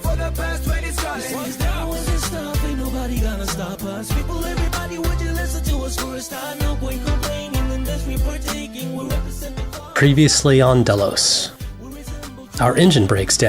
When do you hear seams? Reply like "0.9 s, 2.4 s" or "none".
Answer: none